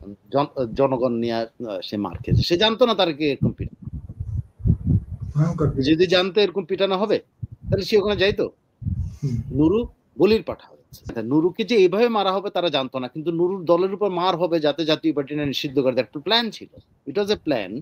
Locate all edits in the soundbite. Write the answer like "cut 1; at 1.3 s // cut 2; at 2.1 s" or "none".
cut 1; at 11.2 s